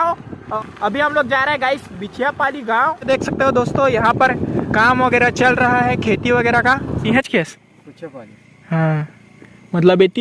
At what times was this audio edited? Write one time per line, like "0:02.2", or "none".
0:03.1
0:07.0